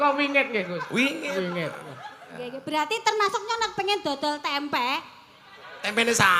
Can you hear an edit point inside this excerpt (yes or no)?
yes